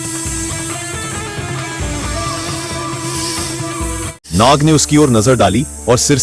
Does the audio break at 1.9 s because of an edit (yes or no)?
no